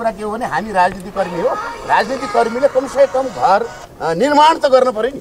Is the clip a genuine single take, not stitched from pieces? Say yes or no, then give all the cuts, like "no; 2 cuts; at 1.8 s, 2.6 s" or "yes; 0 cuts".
yes; 0 cuts